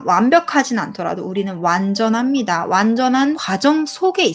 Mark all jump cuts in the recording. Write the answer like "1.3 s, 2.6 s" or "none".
3.4 s